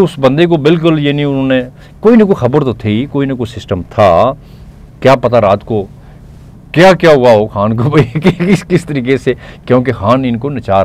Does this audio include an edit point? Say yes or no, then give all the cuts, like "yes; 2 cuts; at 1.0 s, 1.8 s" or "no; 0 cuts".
no; 0 cuts